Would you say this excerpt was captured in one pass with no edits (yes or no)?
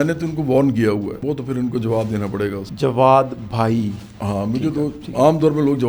no